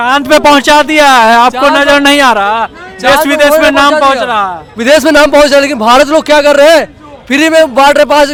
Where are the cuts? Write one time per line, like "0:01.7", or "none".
none